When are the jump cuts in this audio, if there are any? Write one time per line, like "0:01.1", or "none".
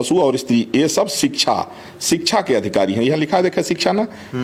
none